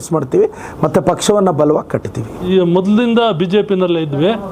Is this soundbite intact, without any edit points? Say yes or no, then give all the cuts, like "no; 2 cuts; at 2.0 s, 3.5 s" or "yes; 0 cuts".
no; 1 cut; at 2.5 s